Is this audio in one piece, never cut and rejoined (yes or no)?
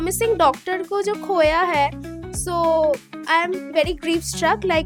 yes